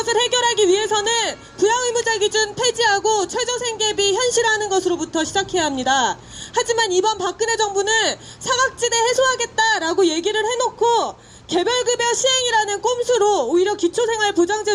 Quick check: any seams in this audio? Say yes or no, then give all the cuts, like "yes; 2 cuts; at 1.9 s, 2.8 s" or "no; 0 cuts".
no; 0 cuts